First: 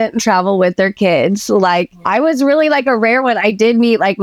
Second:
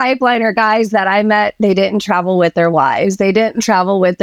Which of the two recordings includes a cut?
first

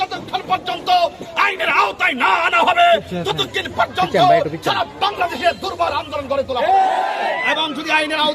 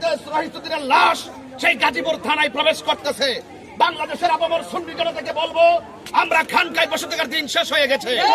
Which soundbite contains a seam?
first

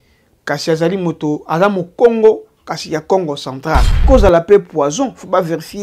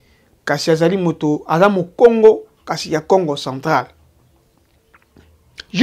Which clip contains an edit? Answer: first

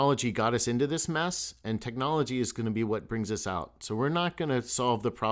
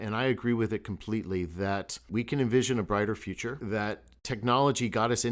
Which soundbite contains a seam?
second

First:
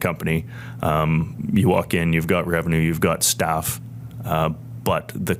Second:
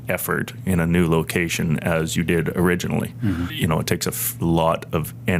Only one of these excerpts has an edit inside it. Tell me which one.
second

